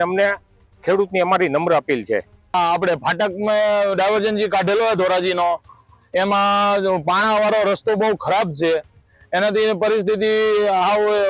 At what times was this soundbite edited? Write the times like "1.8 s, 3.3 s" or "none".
none